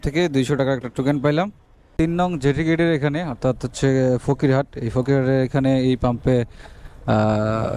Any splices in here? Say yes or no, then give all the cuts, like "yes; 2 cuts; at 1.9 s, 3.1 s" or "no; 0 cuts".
yes; 1 cut; at 1.9 s